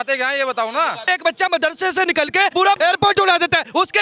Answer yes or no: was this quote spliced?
yes